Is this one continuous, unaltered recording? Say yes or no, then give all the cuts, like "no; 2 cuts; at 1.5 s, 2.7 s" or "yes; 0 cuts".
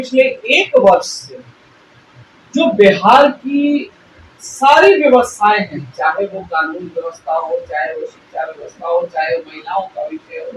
yes; 0 cuts